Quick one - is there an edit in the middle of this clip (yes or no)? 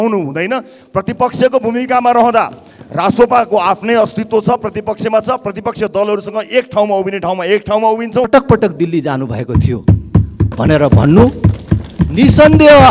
yes